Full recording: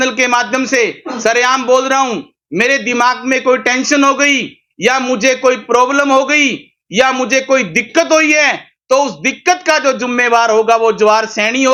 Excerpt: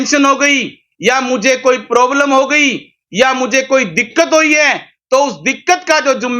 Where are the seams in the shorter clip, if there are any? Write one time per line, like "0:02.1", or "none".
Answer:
none